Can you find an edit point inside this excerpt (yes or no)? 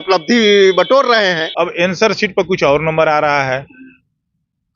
yes